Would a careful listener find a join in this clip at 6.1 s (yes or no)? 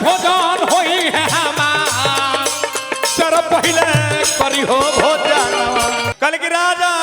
yes